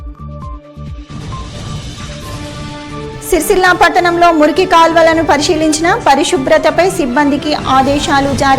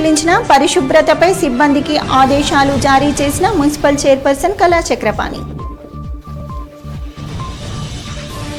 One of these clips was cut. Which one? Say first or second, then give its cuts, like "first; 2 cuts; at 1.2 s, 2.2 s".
first; 1 cut; at 2.6 s